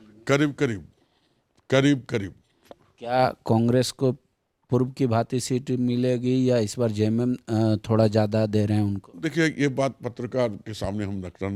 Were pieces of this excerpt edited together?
no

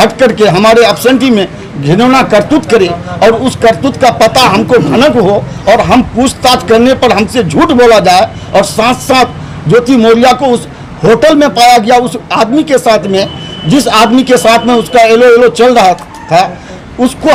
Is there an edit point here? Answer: no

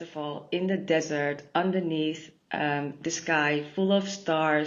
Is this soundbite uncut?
yes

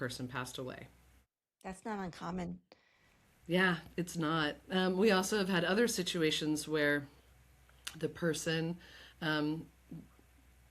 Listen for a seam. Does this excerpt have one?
no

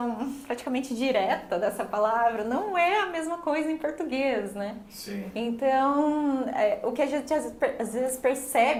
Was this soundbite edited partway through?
no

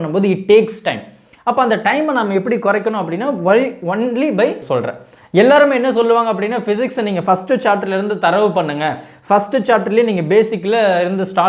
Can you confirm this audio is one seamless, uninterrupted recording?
no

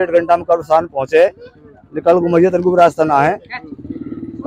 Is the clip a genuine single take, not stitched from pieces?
yes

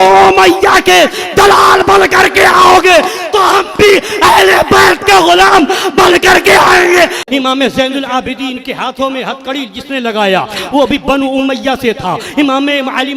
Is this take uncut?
no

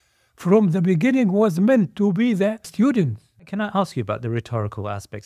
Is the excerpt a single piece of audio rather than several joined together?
no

